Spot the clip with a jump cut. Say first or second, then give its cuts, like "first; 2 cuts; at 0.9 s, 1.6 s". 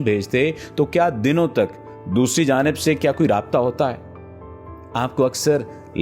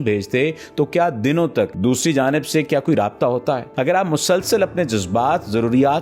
second; 2 cuts; at 1.7 s, 3.7 s